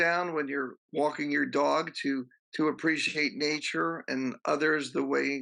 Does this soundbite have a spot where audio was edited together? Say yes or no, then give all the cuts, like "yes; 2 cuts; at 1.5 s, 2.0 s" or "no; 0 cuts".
yes; 1 cut; at 2.4 s